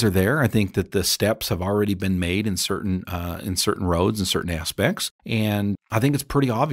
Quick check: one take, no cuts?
yes; 0 cuts

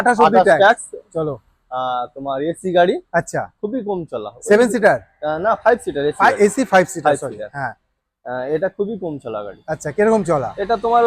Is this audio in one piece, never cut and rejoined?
yes; 0 cuts

